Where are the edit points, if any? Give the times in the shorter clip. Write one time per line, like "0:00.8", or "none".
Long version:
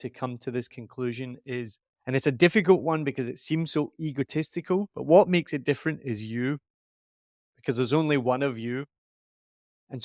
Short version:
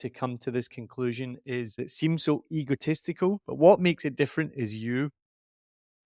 0:01.8